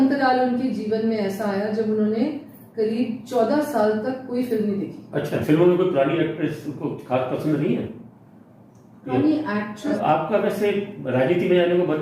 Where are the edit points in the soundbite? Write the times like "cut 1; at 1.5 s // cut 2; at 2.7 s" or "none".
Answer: cut 1; at 5.4 s // cut 2; at 9.9 s